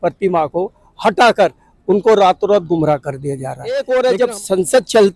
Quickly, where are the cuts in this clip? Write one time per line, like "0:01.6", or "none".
0:03.7